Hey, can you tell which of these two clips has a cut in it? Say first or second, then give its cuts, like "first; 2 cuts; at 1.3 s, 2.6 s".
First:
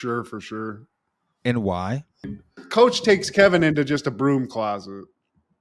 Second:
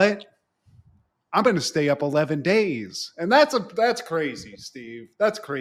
first; 1 cut; at 2.4 s